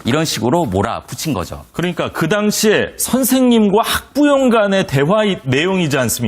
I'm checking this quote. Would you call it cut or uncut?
cut